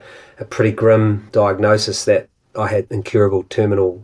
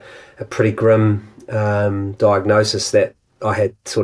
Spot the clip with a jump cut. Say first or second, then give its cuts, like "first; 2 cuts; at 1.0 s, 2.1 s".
first; 2 cuts; at 1.2 s, 2.9 s